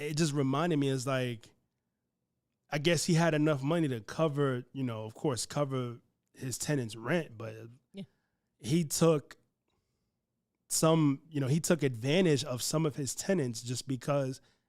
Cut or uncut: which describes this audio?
uncut